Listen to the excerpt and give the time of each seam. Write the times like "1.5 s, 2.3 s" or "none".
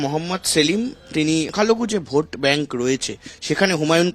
1.5 s